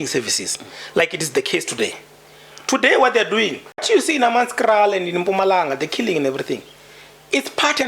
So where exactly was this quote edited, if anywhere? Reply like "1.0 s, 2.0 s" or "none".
3.8 s